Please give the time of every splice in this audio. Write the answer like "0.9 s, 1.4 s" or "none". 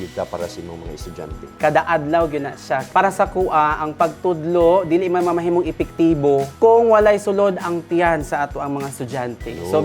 1.5 s, 2.9 s, 6.5 s